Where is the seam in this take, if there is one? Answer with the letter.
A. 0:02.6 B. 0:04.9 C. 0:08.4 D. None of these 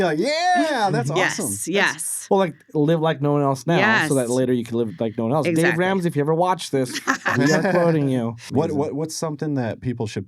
C